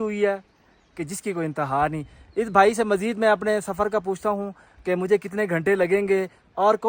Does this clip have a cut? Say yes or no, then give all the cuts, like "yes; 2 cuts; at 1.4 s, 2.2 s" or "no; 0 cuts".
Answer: no; 0 cuts